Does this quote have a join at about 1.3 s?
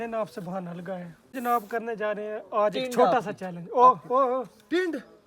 yes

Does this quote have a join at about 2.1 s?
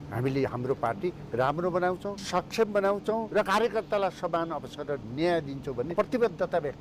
yes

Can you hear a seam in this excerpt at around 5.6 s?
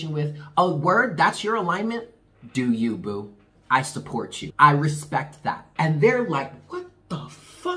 yes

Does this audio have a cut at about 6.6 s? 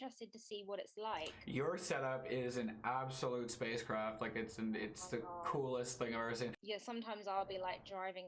yes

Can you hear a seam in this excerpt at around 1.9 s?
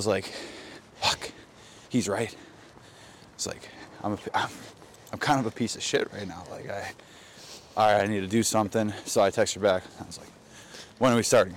no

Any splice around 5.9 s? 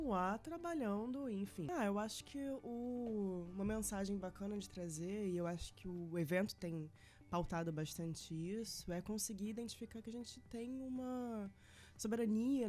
no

